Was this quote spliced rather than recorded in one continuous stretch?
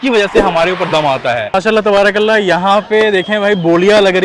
yes; 1 cut; at 1.5 s

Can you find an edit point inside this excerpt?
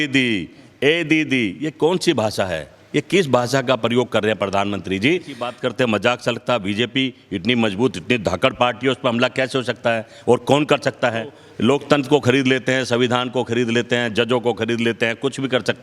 yes; 2 cuts; at 5.5 s, 11.4 s

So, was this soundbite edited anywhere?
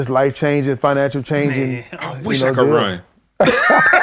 no; 0 cuts

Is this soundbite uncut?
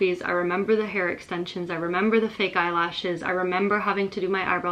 yes; 0 cuts

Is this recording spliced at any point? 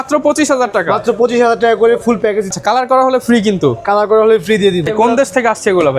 yes; 2 cuts; at 2.5 s, 4.9 s

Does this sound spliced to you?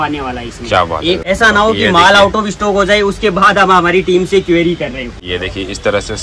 yes; 2 cuts; at 1.2 s, 5.2 s

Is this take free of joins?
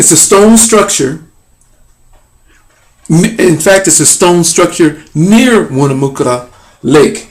no; 1 cut; at 5.8 s

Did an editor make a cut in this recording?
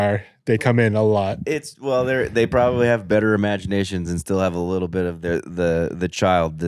no; 0 cuts

